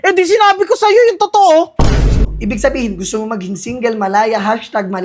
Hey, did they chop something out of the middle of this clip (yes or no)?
yes